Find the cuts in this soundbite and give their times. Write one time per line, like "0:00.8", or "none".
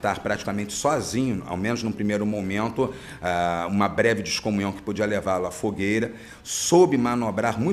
none